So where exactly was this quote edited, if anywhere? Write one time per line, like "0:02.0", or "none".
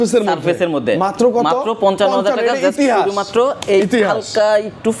none